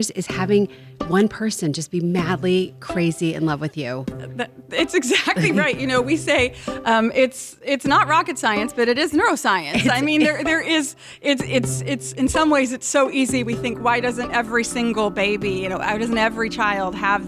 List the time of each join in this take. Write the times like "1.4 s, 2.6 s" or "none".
none